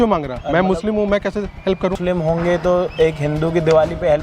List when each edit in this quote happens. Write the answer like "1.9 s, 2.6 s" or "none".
2.0 s